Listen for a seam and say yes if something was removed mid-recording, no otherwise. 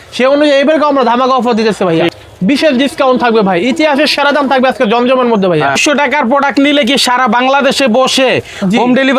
yes